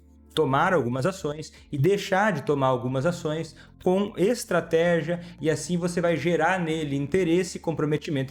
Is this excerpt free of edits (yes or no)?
yes